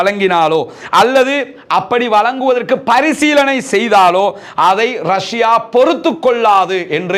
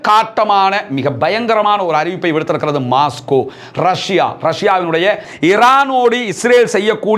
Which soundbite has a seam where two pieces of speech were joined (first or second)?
second